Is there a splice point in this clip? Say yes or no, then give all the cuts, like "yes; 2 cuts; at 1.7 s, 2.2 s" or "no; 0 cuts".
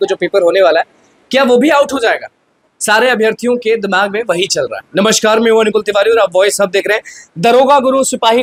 no; 0 cuts